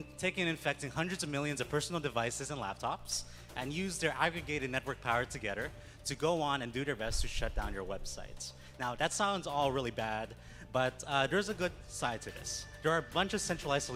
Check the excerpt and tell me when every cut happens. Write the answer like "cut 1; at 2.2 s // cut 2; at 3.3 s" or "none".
none

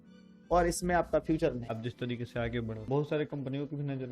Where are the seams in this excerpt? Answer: cut 1; at 1.6 s // cut 2; at 2.9 s

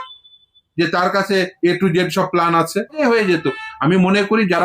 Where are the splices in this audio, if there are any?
cut 1; at 3.0 s

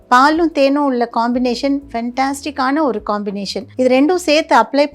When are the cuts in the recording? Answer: cut 1; at 3.6 s

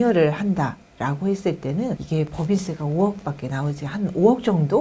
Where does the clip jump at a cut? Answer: cut 1; at 2.0 s

